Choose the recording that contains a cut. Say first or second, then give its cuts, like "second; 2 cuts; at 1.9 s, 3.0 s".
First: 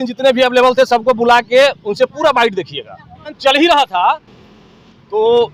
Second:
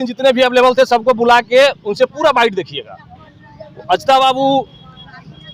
first; 1 cut; at 3.3 s